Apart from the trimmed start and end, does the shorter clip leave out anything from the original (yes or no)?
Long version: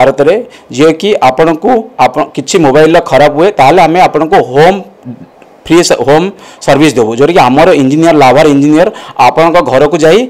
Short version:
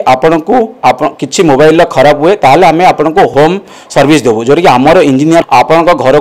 yes